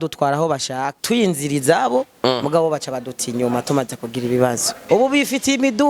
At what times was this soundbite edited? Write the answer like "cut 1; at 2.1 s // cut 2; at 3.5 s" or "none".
cut 1; at 1.0 s // cut 2; at 4.8 s